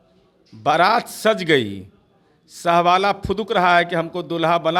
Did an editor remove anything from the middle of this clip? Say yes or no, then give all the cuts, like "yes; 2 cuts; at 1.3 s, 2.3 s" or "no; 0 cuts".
no; 0 cuts